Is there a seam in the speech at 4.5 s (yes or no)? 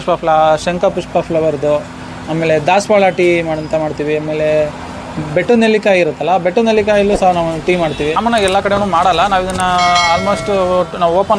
no